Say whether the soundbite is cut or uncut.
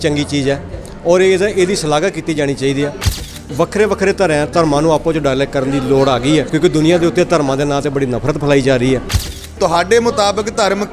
cut